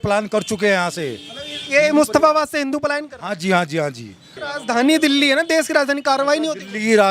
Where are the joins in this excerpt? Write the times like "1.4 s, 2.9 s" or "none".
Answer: 4.3 s